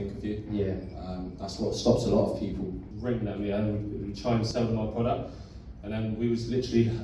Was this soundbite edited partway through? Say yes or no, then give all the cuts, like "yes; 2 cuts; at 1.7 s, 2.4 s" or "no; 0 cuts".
yes; 2 cuts; at 2.8 s, 4.5 s